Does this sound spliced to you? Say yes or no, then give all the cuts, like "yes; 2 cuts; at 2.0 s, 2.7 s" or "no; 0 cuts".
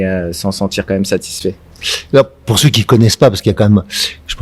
no; 0 cuts